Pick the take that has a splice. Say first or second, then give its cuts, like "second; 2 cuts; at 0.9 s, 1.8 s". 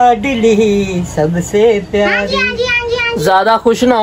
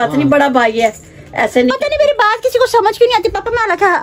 first; 1 cut; at 3.0 s